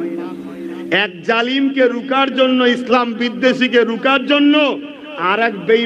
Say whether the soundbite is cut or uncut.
uncut